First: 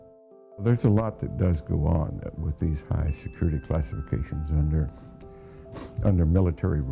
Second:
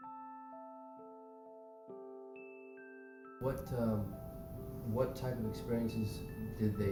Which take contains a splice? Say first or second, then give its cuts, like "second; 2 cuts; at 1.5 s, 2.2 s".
first; 1 cut; at 2.9 s